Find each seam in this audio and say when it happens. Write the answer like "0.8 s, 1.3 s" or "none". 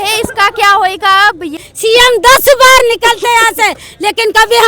1.6 s

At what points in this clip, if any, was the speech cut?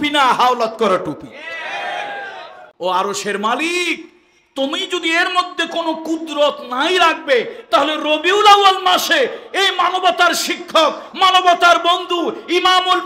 2.6 s

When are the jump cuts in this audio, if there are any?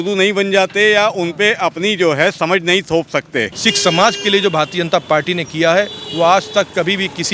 3.6 s

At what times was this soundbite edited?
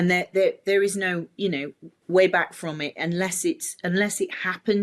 none

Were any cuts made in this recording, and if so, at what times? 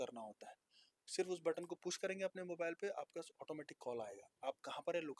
none

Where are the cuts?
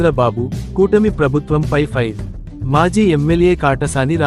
none

